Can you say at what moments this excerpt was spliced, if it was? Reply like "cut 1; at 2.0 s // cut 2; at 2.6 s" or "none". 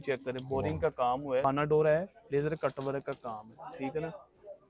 cut 1; at 1.4 s